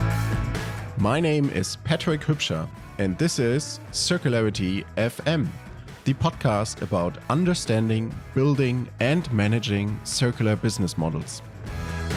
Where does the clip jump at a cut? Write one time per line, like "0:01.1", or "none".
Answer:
none